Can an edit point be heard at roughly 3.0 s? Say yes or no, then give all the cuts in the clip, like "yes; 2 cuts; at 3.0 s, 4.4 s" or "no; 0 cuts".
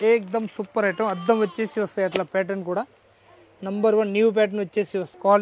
no; 0 cuts